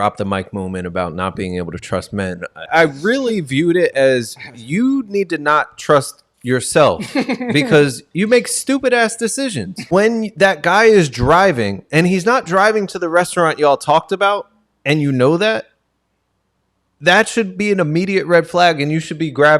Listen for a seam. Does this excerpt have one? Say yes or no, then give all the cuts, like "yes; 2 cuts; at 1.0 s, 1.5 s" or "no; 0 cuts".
yes; 2 cuts; at 2.7 s, 9.9 s